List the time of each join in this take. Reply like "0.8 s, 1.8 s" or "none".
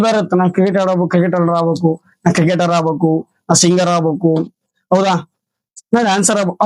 none